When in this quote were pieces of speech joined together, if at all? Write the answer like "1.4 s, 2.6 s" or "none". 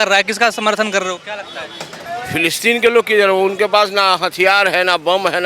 2.0 s